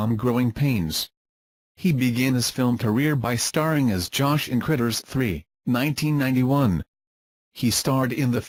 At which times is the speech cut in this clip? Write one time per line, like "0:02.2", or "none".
none

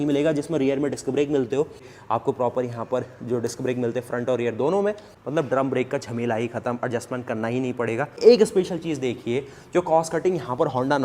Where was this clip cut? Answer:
0:01.9
0:08.2

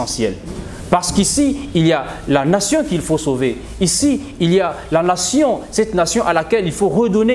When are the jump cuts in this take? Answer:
none

